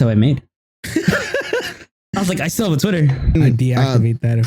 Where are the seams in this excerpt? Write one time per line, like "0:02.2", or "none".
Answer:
0:03.3